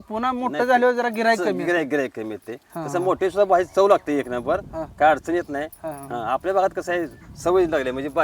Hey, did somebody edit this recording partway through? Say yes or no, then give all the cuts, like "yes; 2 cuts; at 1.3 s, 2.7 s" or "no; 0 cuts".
no; 0 cuts